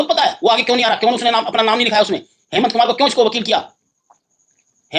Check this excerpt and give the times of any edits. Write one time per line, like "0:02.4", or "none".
none